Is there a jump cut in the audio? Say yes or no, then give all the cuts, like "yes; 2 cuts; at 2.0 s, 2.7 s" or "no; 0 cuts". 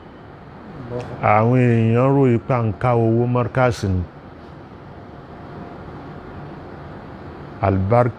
no; 0 cuts